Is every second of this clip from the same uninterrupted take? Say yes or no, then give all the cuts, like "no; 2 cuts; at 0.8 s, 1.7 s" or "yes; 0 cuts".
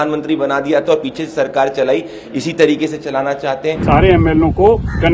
no; 1 cut; at 3.8 s